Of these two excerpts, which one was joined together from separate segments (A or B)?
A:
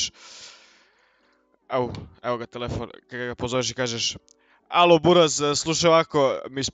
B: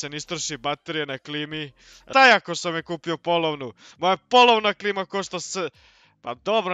B